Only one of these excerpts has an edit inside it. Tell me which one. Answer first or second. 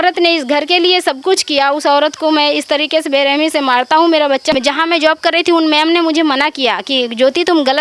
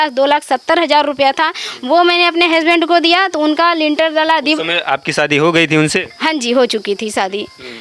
first